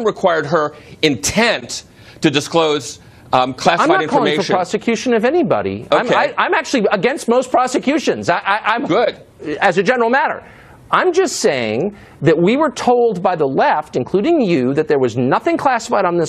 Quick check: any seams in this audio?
no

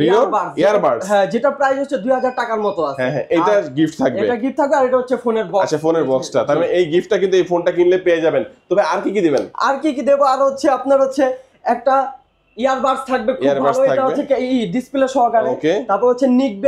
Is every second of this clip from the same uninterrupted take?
yes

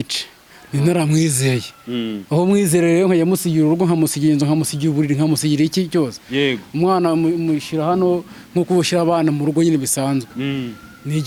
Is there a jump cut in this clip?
no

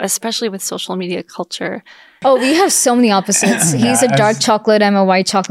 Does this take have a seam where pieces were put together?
yes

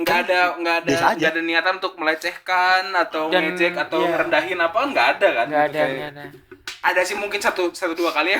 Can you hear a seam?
no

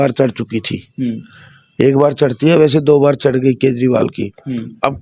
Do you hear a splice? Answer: no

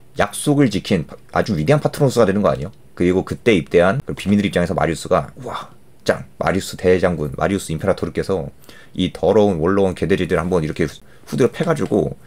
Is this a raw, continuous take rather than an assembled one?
no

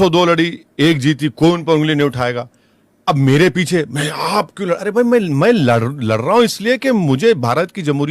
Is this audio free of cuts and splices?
yes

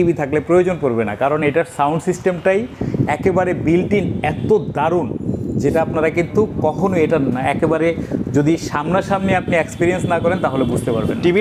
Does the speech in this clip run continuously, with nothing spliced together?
yes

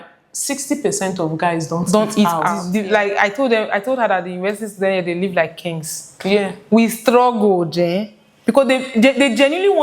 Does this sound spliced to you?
yes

